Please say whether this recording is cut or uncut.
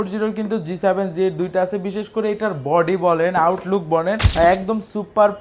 cut